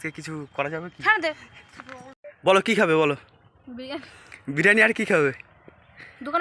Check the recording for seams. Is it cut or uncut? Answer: cut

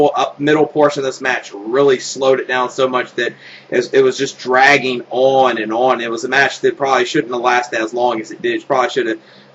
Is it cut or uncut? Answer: uncut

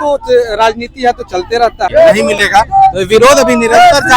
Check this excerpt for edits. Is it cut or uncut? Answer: cut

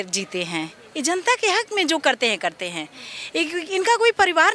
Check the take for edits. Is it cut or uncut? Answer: uncut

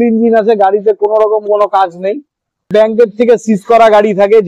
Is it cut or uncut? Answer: cut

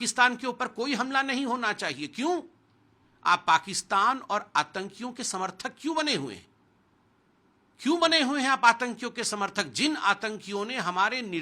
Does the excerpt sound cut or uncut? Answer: uncut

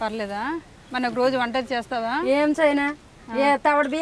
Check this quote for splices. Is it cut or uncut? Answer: uncut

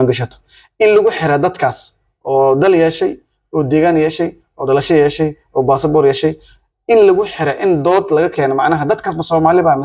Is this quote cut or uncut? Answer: uncut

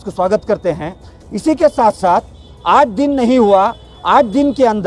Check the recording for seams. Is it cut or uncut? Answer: uncut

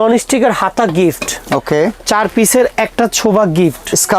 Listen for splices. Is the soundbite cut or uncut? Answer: uncut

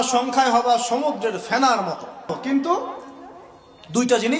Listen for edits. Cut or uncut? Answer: cut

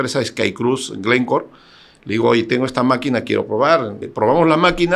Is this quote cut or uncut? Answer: cut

